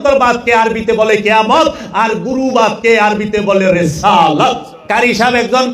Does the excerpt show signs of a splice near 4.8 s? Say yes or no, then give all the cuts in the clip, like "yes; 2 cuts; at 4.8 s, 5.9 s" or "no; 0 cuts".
yes; 1 cut; at 4.8 s